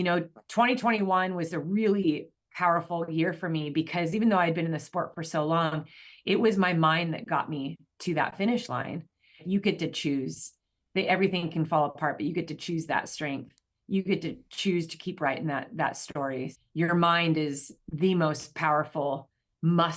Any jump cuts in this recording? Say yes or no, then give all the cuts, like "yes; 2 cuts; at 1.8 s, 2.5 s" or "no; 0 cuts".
yes; 2 cuts; at 9.4 s, 16.5 s